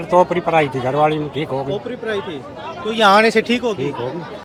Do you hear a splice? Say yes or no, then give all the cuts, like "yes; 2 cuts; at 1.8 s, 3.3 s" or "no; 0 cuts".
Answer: no; 0 cuts